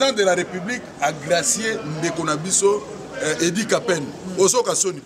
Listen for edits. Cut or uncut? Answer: uncut